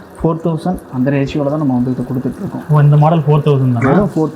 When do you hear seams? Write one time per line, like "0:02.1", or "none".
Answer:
none